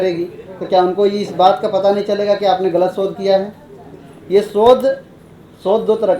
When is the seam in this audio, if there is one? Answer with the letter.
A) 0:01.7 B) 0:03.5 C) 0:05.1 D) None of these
D